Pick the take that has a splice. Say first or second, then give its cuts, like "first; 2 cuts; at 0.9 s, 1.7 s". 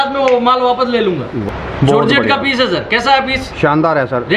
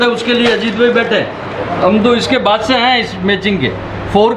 first; 1 cut; at 1.4 s